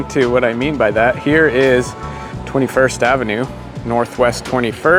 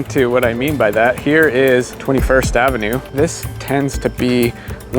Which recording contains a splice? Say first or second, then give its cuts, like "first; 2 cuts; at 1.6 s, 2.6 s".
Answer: second; 2 cuts; at 1.9 s, 3.1 s